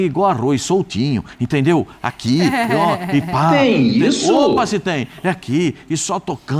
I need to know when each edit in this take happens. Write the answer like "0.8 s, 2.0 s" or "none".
none